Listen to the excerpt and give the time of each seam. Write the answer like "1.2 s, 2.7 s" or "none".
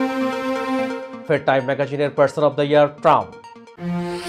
1.1 s